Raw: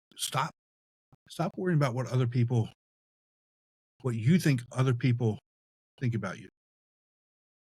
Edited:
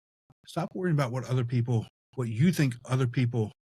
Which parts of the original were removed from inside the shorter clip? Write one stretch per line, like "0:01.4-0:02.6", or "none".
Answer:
0:02.8-0:03.9